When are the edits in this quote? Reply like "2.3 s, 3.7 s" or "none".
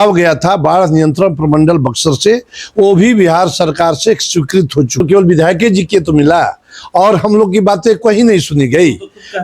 5.0 s